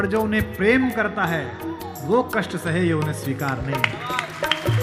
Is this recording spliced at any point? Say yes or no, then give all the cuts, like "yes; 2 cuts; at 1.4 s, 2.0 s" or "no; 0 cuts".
no; 0 cuts